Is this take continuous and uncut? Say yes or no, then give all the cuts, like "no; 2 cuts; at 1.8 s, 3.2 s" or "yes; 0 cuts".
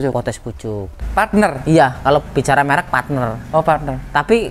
no; 1 cut; at 0.9 s